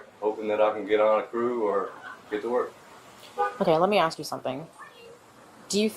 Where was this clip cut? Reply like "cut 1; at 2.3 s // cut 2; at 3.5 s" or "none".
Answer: none